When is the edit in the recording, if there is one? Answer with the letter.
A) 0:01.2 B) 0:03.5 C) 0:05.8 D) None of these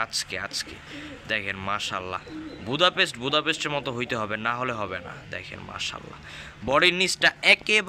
D